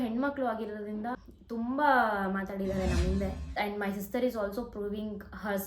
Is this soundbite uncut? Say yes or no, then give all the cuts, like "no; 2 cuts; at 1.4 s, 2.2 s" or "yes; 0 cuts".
no; 2 cuts; at 1.3 s, 3.6 s